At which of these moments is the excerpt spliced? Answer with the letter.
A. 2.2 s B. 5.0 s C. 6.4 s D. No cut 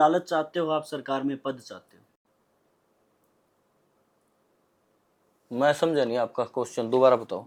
D